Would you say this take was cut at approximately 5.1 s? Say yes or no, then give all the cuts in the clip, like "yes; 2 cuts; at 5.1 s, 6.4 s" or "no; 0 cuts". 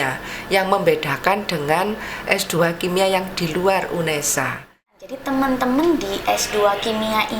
yes; 1 cut; at 5.1 s